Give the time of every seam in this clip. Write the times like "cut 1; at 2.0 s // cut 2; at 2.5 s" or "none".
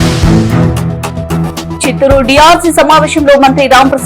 cut 1; at 1.4 s

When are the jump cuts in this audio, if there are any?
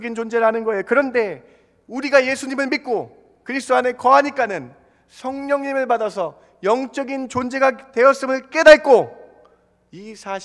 none

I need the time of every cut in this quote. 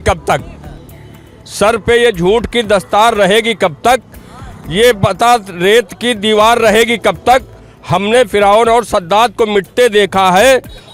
none

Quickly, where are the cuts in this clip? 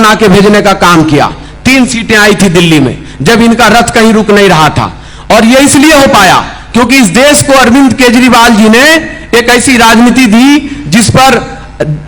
none

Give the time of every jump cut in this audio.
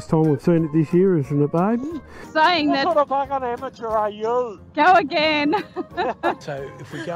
cut 1; at 2.2 s // cut 2; at 6.4 s

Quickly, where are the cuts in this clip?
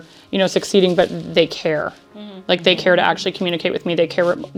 none

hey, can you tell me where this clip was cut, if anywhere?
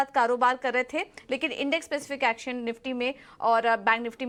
none

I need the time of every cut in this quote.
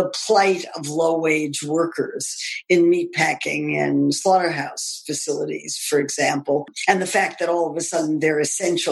cut 1; at 6.7 s

